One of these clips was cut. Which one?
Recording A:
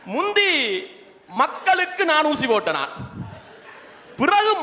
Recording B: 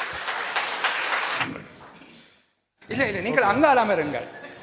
B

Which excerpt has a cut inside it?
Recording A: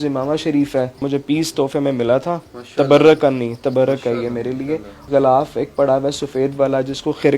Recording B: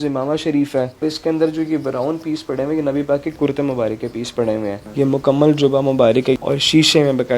B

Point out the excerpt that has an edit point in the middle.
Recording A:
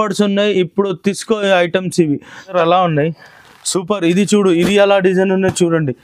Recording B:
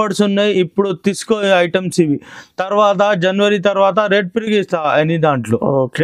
A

